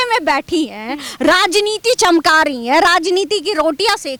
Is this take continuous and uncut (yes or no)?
yes